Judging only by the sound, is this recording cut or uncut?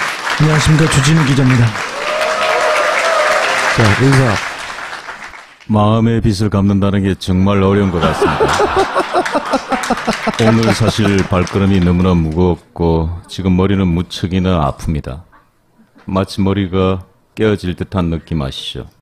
uncut